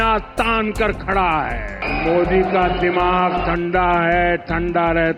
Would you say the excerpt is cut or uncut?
cut